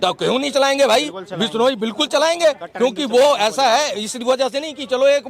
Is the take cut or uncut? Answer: uncut